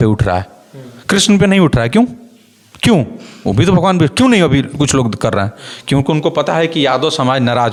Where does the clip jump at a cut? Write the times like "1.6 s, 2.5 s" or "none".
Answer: none